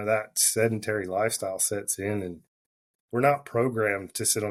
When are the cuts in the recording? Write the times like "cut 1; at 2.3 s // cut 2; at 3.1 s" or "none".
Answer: none

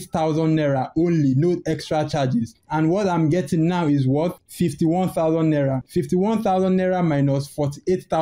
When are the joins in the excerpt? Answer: none

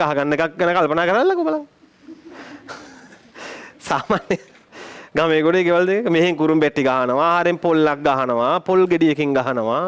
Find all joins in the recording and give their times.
none

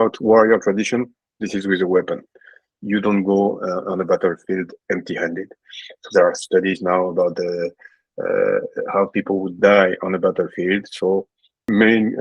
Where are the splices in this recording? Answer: none

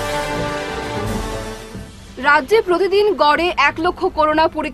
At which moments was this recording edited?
none

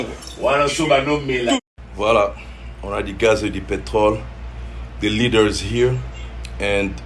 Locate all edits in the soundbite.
cut 1; at 1.8 s

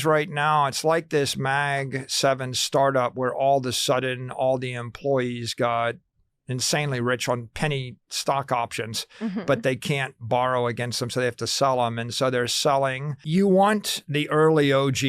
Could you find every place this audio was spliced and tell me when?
cut 1; at 13.1 s

